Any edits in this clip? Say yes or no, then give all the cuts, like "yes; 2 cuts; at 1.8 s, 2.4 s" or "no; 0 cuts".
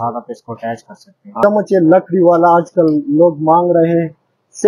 yes; 1 cut; at 1.2 s